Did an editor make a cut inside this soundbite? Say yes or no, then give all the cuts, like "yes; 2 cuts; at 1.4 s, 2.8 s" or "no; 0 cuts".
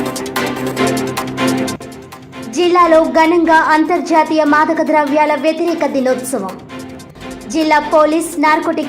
yes; 1 cut; at 1.7 s